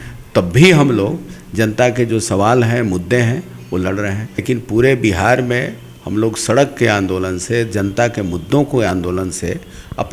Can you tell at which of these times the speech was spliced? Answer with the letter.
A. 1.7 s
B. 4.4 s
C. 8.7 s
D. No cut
B